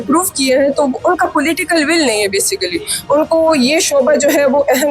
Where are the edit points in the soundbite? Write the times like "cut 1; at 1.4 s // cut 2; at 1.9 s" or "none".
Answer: none